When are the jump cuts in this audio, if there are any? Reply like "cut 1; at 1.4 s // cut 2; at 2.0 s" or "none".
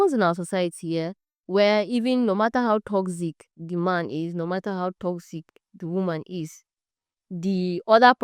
none